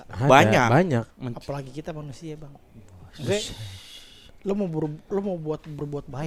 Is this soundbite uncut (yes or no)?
yes